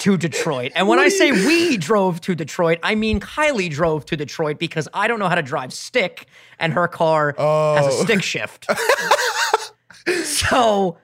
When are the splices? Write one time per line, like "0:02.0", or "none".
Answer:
none